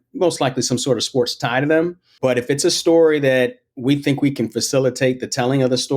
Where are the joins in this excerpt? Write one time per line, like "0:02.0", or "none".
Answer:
0:02.0